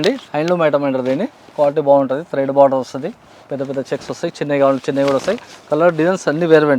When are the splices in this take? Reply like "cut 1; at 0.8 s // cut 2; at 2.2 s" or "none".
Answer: none